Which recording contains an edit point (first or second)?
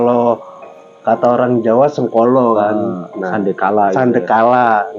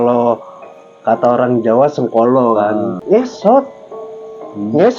second